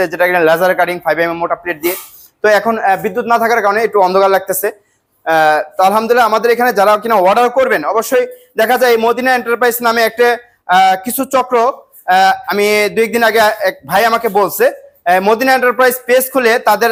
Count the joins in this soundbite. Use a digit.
0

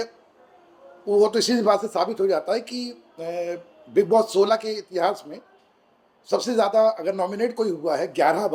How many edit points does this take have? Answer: 0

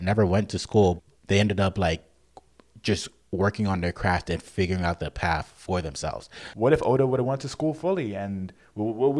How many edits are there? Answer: 2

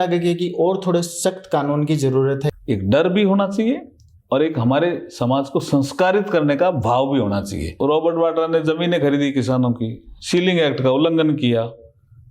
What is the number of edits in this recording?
2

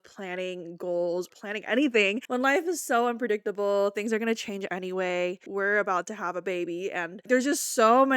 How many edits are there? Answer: 3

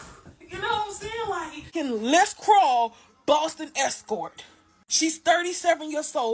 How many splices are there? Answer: 1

